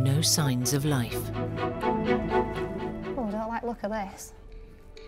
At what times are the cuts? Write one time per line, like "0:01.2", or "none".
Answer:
0:03.1